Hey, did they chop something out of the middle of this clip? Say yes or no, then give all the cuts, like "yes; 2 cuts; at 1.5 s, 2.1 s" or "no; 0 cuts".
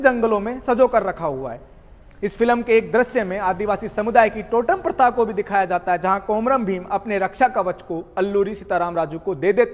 no; 0 cuts